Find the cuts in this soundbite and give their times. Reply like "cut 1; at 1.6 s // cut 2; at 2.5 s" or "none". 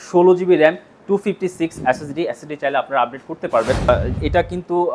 cut 1; at 3.9 s